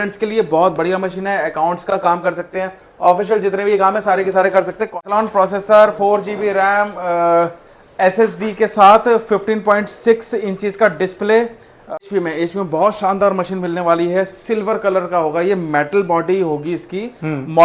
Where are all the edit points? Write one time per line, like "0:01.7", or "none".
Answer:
0:05.1
0:12.0